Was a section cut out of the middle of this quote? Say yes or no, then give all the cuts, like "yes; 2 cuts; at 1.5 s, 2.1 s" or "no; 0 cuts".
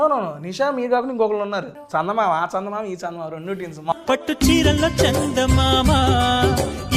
yes; 2 cuts; at 1.8 s, 3.9 s